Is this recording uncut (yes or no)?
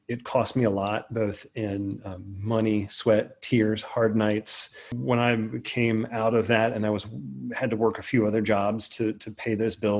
no